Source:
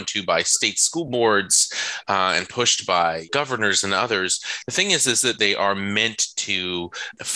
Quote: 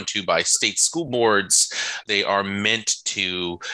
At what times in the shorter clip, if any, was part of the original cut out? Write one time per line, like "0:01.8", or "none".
0:02.0